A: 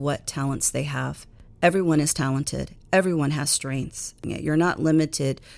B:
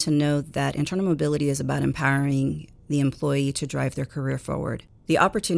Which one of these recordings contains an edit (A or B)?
A